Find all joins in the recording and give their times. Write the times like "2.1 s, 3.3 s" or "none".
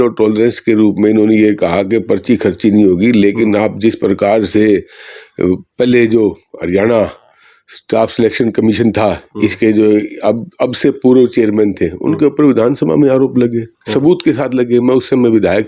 none